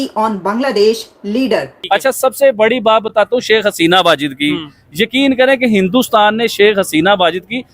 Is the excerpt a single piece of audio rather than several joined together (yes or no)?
no